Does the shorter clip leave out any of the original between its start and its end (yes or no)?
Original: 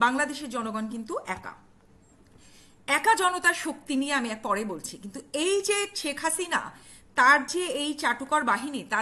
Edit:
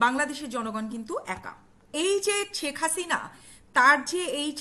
yes